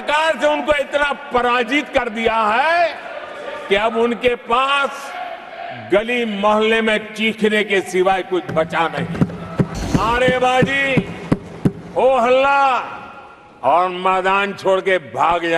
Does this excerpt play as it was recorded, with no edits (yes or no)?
no